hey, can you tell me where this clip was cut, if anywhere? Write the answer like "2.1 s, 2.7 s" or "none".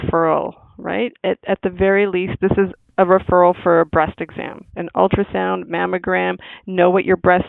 none